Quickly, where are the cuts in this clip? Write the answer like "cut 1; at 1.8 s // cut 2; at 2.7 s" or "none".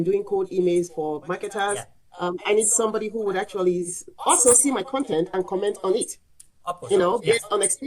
none